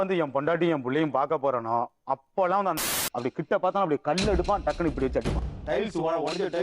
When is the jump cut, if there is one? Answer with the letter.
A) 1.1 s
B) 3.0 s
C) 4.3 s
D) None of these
B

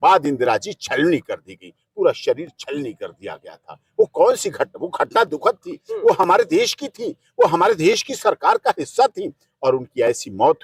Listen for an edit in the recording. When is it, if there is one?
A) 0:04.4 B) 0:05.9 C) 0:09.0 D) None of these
D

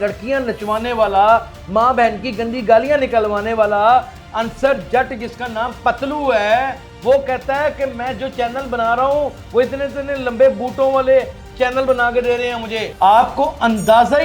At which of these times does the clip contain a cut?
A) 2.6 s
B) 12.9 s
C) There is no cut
B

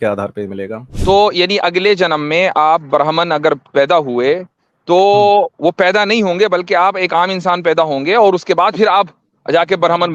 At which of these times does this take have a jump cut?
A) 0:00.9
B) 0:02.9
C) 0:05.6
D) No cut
A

